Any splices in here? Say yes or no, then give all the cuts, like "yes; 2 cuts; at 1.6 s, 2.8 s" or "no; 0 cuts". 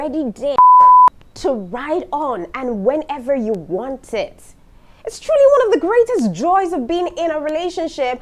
no; 0 cuts